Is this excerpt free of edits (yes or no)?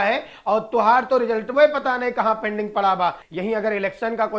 no